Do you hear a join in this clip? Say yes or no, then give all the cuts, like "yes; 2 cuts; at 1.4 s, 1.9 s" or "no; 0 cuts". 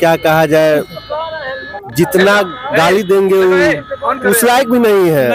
no; 0 cuts